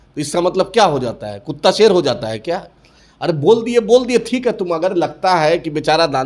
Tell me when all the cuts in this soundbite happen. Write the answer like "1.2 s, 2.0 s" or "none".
none